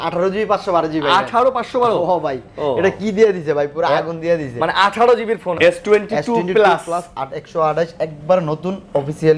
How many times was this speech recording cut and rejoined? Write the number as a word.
one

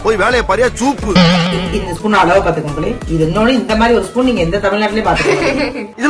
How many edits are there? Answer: one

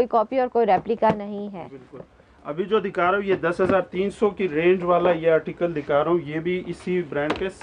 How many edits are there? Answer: zero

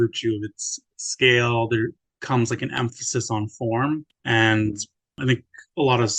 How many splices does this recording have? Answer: three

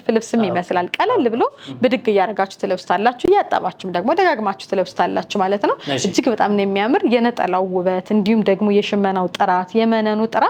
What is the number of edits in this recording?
zero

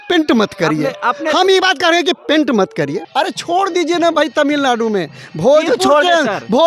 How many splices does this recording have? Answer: one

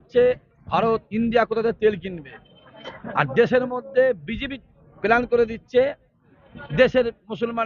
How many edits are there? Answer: zero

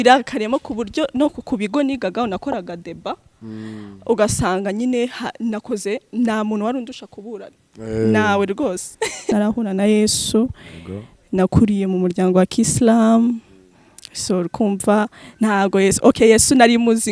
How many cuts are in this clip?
one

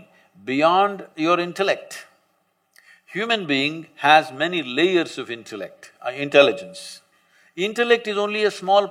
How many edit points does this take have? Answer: zero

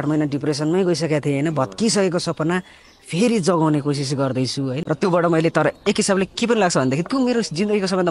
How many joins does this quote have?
one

